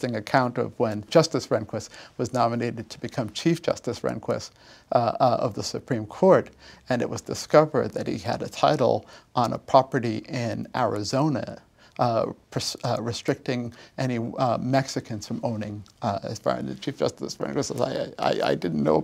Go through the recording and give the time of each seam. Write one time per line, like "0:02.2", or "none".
0:01.1